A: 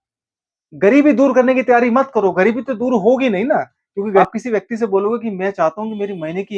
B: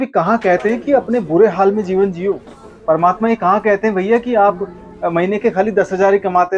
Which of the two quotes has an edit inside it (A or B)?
A